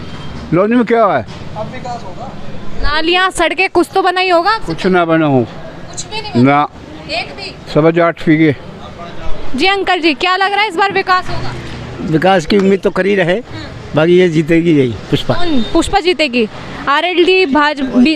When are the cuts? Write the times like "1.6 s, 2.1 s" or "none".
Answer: none

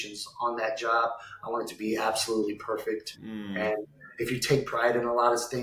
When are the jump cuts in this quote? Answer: none

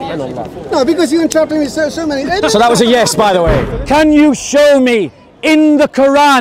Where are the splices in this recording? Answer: 3.6 s

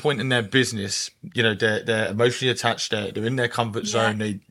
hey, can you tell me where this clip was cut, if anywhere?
none

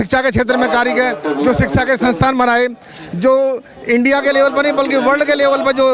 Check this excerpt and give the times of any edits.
none

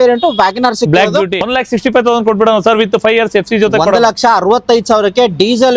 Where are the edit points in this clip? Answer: 1.5 s

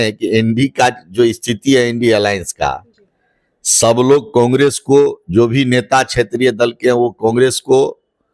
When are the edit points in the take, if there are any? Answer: none

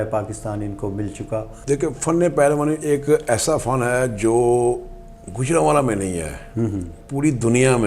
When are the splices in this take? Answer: 1.5 s

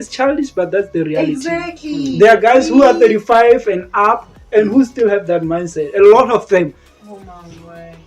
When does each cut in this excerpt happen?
none

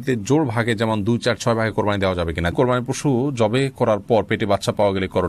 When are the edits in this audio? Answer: 2.5 s

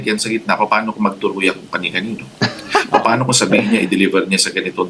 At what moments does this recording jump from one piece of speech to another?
none

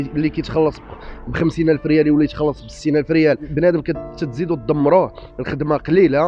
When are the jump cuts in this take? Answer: 3.5 s

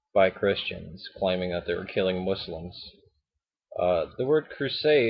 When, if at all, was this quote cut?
2.5 s

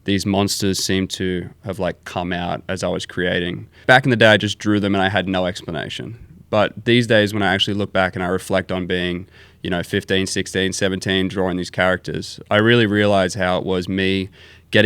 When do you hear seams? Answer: 3.8 s

